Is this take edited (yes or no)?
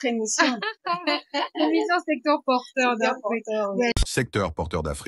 no